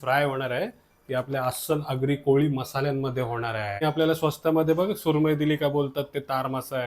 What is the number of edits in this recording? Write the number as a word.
one